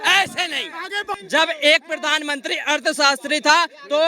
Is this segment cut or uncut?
cut